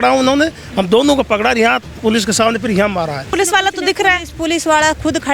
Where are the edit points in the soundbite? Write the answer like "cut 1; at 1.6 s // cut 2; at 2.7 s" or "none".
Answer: cut 1; at 3.3 s